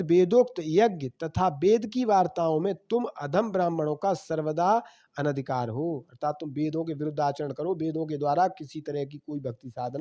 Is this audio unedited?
yes; 0 cuts

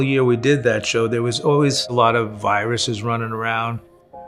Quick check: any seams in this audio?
no; 0 cuts

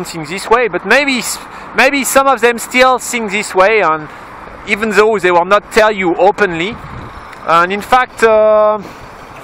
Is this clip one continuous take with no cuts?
yes; 0 cuts

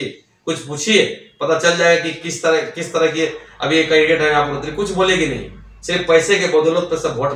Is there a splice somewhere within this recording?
no; 0 cuts

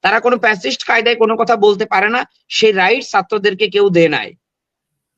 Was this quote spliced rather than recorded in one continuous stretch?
no; 0 cuts

